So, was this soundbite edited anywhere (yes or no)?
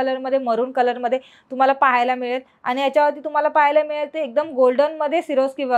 no